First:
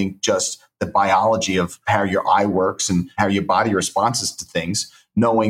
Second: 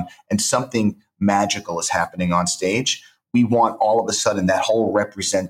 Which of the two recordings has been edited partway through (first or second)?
first